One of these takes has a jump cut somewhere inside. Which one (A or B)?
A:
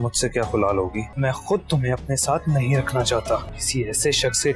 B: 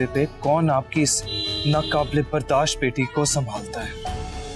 A